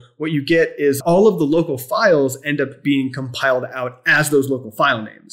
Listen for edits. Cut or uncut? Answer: cut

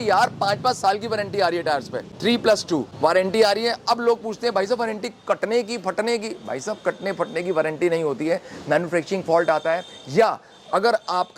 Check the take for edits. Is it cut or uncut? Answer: uncut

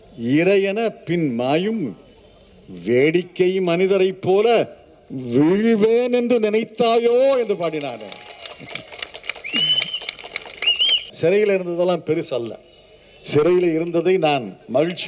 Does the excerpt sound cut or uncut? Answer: cut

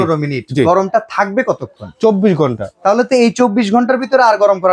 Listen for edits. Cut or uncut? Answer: uncut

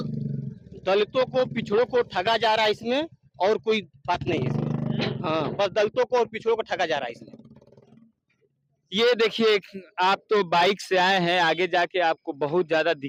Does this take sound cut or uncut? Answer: uncut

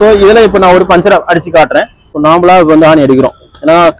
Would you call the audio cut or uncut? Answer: cut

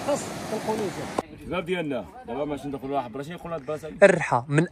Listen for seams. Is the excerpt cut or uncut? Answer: cut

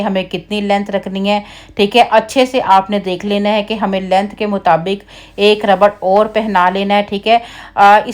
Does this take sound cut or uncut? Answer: uncut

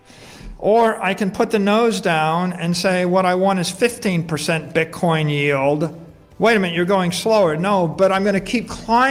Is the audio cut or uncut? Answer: uncut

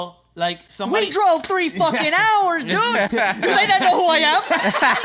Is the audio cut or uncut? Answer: uncut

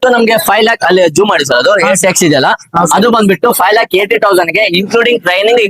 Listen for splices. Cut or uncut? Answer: uncut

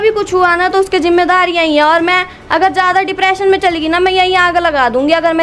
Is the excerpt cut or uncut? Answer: uncut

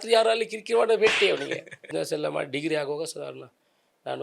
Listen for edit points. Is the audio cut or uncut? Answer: cut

